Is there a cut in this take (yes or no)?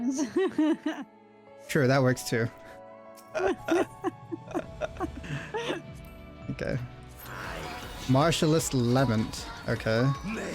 yes